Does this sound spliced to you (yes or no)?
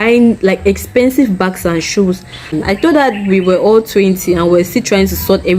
yes